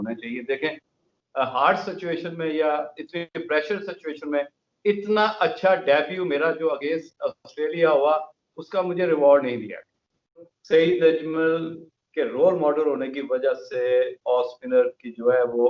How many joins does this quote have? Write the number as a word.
two